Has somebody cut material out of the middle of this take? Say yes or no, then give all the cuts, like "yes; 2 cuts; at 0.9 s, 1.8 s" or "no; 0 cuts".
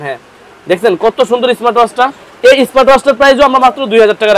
no; 0 cuts